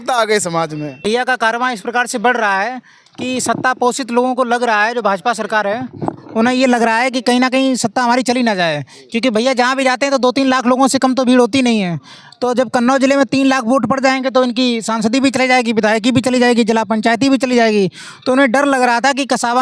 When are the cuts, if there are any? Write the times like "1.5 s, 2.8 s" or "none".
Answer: 1.0 s